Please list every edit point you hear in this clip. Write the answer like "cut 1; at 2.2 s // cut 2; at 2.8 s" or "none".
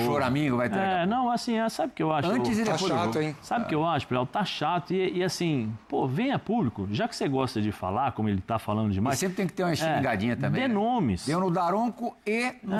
none